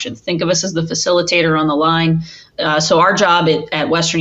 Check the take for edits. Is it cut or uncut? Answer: cut